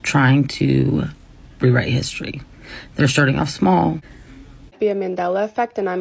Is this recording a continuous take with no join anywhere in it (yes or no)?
no